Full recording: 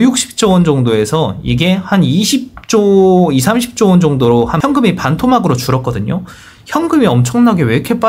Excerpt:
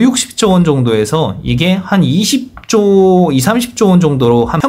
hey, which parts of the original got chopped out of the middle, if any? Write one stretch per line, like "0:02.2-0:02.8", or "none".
none